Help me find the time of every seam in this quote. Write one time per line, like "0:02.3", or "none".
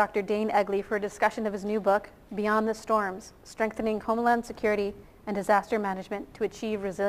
0:01.8